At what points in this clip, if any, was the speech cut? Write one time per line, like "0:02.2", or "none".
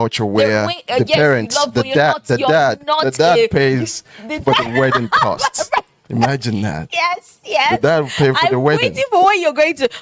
none